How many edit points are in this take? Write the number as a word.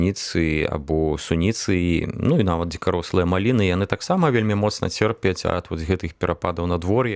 zero